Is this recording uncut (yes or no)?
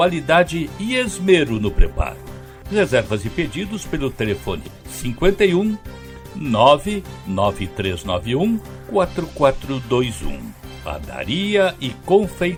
yes